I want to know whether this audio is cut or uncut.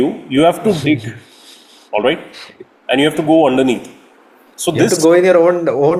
uncut